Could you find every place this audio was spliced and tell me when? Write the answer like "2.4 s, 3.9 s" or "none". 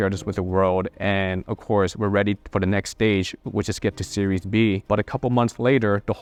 none